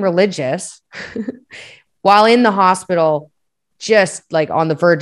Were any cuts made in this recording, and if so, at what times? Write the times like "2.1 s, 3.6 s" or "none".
none